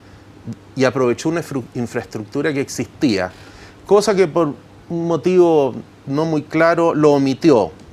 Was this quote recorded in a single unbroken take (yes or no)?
no